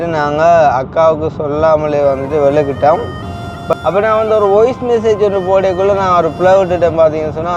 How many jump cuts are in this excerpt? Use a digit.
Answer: 1